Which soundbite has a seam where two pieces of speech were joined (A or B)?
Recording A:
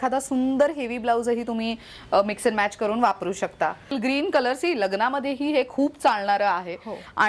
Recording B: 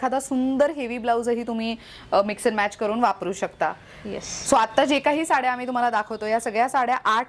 A